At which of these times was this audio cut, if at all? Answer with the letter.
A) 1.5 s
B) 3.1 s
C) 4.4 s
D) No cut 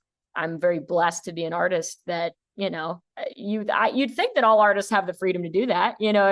B